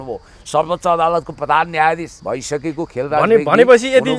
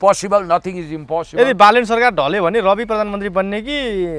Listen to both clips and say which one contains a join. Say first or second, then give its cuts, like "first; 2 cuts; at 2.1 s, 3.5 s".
first; 1 cut; at 2.1 s